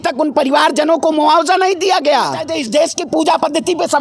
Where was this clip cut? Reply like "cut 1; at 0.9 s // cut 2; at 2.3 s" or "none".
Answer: cut 1; at 2.5 s